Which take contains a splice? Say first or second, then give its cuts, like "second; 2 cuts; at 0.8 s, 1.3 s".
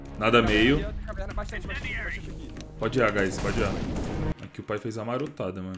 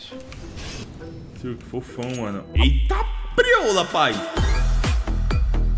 first; 1 cut; at 4.4 s